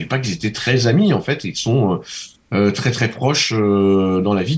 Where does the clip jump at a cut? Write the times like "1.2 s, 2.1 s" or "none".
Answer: none

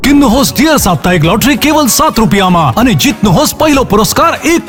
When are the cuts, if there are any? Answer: none

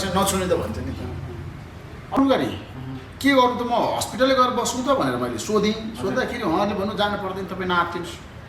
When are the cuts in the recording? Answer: 2.2 s

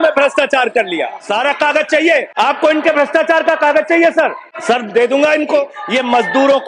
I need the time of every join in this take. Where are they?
1.2 s, 2.3 s, 4.5 s, 5.8 s

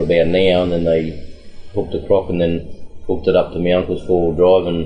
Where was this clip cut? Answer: none

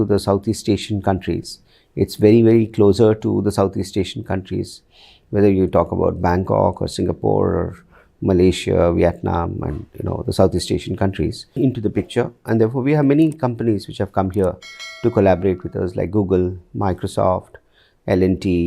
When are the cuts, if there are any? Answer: 11.4 s

